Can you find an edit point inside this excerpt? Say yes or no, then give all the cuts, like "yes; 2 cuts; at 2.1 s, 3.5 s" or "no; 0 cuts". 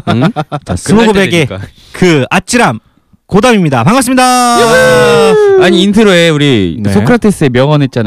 yes; 1 cut; at 2.3 s